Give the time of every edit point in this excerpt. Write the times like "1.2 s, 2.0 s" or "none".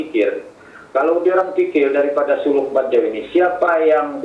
none